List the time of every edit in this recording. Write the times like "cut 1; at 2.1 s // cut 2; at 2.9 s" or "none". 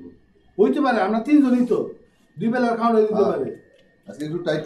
none